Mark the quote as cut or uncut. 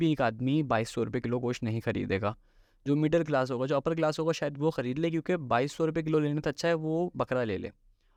uncut